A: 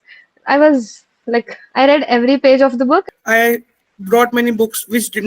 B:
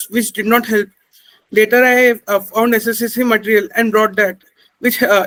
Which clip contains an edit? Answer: A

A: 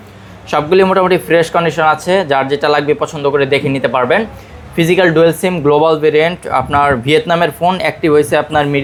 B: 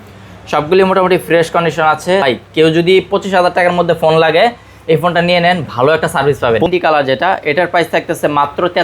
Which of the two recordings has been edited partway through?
B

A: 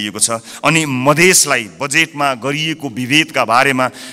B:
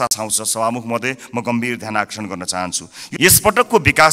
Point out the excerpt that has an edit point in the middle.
B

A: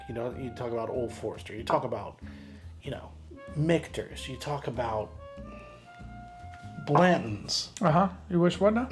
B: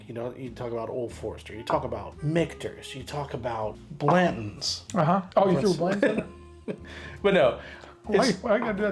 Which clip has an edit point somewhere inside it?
B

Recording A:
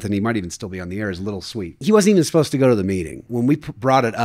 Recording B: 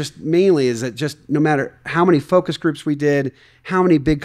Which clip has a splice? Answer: A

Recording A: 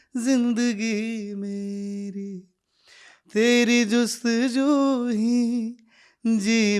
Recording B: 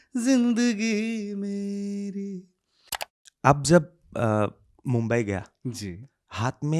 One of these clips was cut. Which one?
B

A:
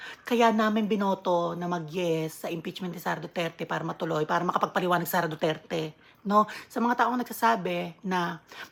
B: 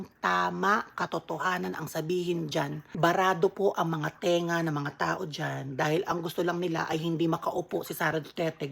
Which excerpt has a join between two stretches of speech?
B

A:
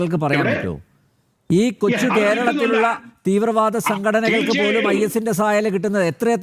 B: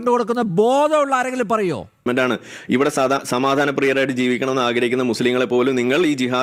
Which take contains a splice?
B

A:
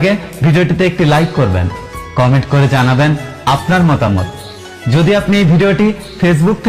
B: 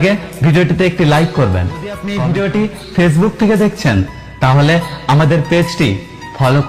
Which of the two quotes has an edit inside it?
B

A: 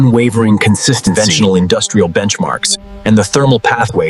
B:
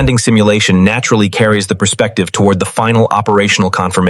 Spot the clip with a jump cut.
A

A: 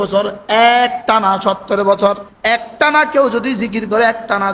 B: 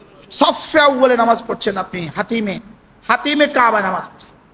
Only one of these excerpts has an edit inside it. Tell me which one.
A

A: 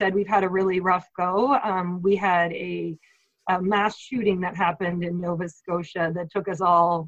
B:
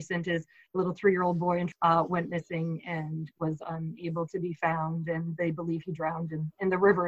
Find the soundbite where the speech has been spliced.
B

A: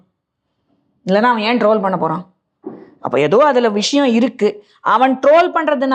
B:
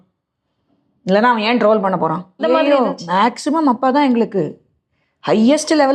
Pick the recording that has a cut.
B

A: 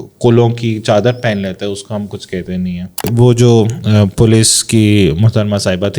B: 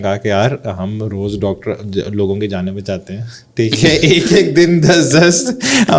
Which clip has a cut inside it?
A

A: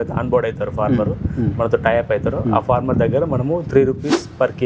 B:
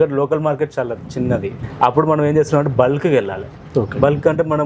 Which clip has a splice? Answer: B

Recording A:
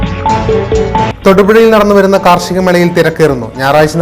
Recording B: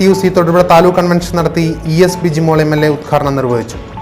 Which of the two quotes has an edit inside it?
A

